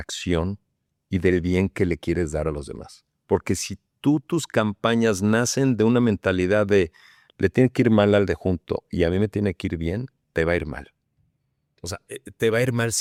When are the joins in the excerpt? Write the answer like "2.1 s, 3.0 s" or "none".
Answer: none